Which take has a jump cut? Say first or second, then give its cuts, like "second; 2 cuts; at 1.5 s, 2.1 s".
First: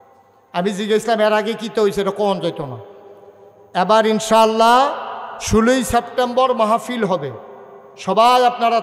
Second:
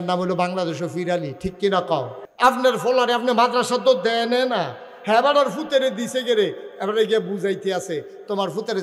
second; 1 cut; at 2.2 s